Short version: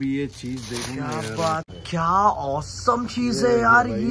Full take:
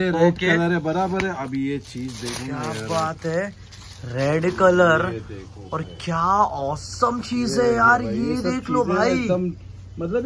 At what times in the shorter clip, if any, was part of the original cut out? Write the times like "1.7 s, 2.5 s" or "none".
1.7 s